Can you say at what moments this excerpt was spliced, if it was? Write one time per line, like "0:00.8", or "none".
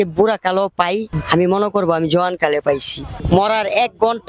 0:01.1
0:03.2